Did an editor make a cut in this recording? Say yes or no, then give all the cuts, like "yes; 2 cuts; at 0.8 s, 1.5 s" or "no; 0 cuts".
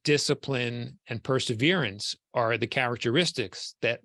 no; 0 cuts